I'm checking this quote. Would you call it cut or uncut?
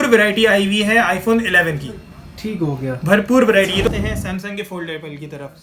cut